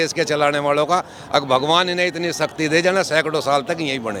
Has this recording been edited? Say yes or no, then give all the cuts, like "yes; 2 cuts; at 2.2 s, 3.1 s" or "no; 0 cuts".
no; 0 cuts